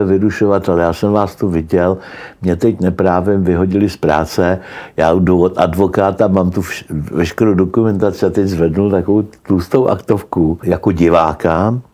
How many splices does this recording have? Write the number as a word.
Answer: one